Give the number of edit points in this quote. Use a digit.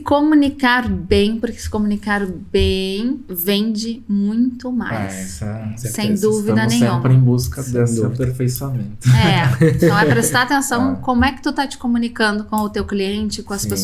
2